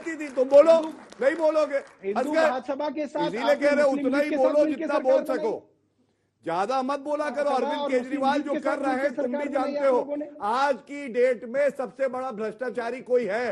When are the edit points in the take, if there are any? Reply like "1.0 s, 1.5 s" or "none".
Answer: none